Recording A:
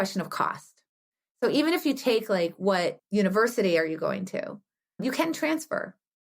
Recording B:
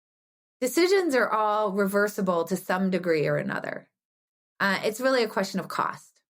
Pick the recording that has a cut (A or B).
A